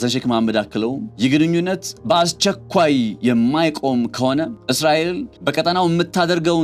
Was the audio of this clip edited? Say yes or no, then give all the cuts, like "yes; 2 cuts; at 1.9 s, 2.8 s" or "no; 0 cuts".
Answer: yes; 3 cuts; at 1.1 s, 4.6 s, 5.3 s